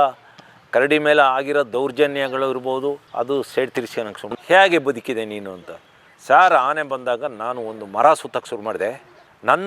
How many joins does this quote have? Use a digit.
1